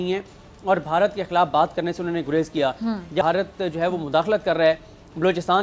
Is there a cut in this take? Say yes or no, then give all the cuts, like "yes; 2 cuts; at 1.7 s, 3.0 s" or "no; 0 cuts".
yes; 1 cut; at 3.2 s